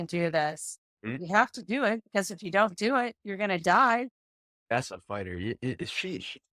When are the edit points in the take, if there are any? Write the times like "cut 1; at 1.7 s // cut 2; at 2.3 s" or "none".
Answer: cut 1; at 1.2 s // cut 2; at 4.6 s